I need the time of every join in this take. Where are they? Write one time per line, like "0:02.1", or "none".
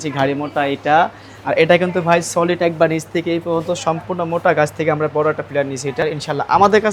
0:06.0